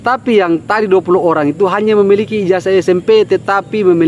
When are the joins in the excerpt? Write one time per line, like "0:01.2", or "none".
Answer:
none